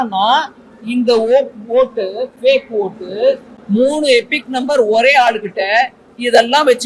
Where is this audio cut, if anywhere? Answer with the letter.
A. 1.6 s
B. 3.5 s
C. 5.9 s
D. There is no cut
D